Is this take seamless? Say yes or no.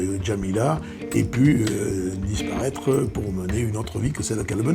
yes